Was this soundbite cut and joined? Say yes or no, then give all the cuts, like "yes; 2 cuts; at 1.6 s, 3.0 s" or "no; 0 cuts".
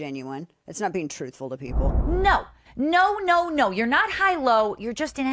yes; 1 cut; at 1.9 s